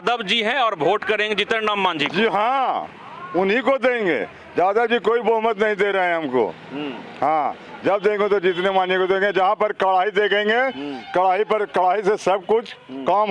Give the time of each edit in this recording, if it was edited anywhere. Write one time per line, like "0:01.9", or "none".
none